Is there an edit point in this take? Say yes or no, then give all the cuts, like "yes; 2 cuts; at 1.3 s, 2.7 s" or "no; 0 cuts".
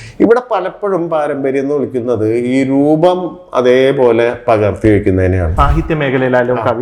yes; 1 cut; at 5.5 s